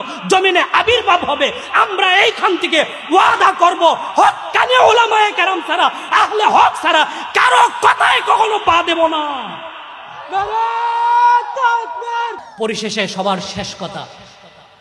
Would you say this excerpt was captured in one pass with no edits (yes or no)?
no